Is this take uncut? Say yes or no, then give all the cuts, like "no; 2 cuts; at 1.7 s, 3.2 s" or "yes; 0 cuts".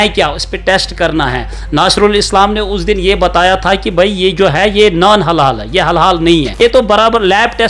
no; 1 cut; at 6.6 s